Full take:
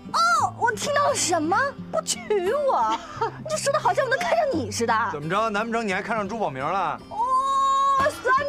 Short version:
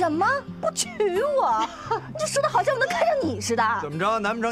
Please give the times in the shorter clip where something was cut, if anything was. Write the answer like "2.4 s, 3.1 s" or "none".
none

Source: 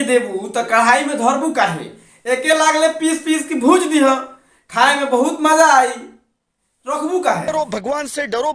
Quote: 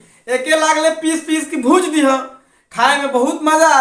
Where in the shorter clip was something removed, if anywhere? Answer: none

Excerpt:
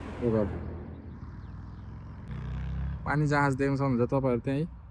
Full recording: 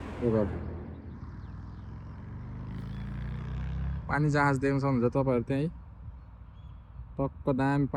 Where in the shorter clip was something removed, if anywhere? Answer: 2.3 s

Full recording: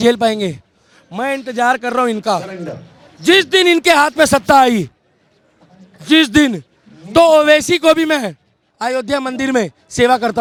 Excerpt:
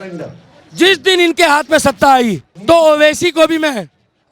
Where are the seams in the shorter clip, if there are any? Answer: 2.5 s

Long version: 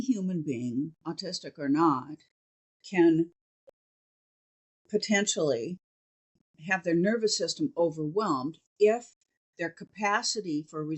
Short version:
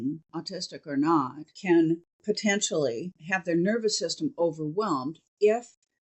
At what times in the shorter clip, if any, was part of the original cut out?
1.4 s, 2.1 s, 3.2 s

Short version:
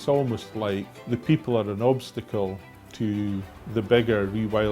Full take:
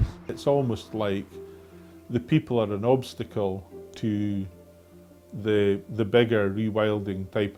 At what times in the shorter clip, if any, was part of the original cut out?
0.9 s, 3.6 s

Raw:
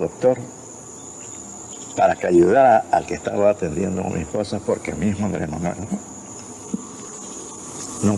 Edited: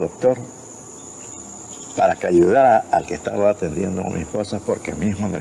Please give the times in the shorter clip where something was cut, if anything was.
none

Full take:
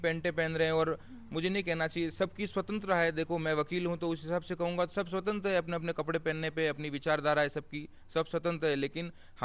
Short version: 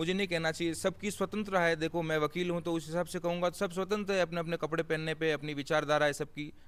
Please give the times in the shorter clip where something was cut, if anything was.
none

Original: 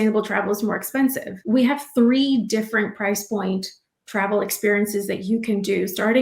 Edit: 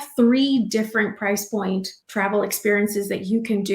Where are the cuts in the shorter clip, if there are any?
2.0 s

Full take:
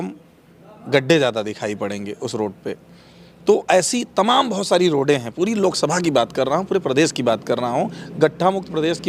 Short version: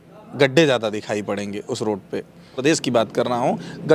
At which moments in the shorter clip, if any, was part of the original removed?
2.6 s

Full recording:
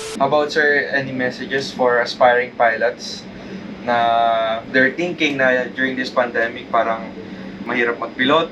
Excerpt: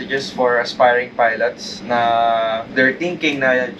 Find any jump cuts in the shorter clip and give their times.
1.7 s

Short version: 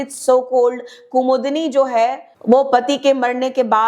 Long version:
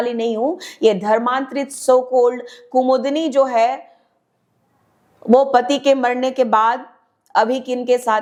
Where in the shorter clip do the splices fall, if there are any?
2.3 s

